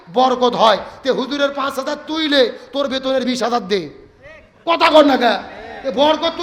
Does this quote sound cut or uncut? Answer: uncut